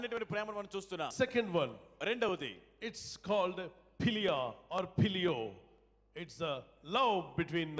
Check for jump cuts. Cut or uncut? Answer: cut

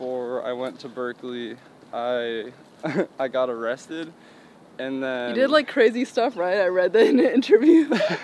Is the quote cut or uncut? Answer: uncut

